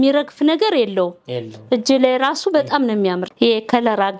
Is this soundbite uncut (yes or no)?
no